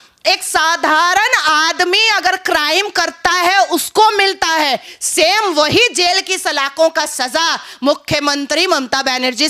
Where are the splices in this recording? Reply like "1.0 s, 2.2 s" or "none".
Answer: none